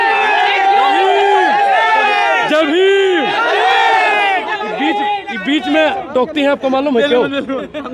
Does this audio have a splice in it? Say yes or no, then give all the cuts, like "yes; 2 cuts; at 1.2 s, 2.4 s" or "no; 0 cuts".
no; 0 cuts